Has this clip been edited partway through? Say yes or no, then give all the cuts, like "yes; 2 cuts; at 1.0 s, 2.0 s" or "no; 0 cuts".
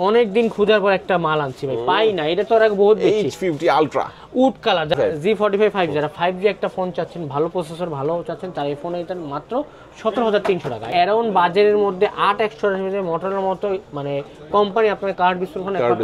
yes; 2 cuts; at 4.9 s, 10.9 s